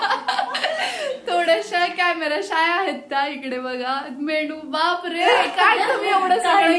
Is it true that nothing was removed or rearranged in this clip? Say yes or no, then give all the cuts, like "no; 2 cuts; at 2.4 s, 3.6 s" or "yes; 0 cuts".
yes; 0 cuts